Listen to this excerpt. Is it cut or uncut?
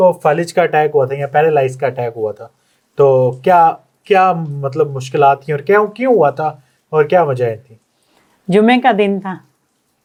uncut